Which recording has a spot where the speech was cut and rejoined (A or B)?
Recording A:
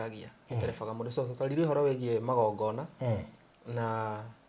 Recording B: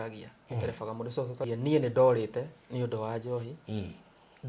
B